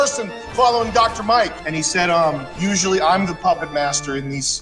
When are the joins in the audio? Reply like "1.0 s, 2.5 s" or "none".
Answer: 1.5 s, 2.5 s